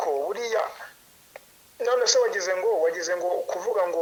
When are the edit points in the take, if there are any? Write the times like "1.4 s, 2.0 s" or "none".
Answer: none